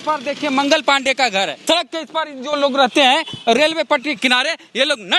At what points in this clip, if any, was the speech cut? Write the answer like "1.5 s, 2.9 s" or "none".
1.6 s